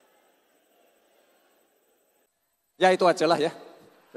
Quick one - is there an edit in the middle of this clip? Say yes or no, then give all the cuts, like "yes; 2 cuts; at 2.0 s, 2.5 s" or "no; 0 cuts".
yes; 1 cut; at 2.3 s